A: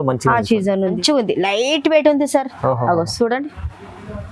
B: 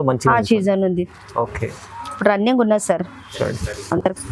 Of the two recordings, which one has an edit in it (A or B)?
A